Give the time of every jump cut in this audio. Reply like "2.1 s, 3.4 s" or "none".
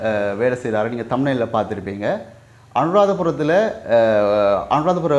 none